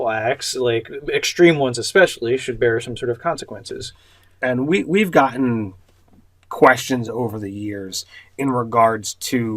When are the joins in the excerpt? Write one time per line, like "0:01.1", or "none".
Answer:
0:03.2